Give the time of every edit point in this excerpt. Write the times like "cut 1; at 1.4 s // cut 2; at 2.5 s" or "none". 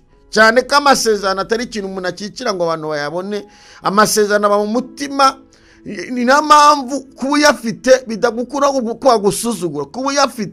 none